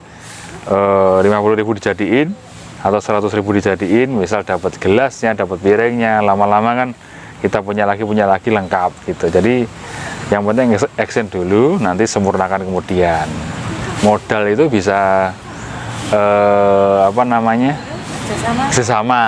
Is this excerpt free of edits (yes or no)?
yes